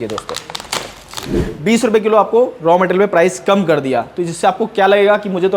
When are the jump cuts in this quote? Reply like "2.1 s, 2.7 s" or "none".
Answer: 1.3 s